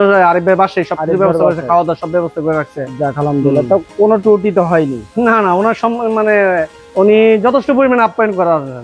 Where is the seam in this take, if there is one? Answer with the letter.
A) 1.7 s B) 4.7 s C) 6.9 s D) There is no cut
D